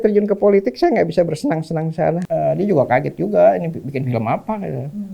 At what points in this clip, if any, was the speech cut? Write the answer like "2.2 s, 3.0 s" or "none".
2.2 s